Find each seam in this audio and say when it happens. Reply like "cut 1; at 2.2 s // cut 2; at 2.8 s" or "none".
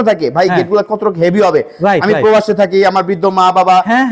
none